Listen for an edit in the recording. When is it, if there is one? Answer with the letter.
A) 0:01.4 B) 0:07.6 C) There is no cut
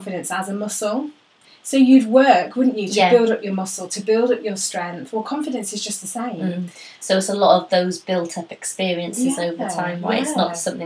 A